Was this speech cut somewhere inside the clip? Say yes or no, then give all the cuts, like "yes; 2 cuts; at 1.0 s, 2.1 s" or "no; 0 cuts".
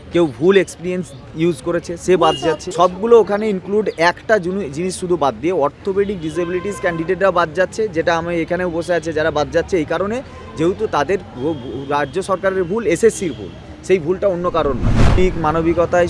yes; 2 cuts; at 2.6 s, 15.2 s